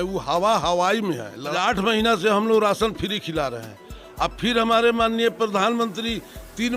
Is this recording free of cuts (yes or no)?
no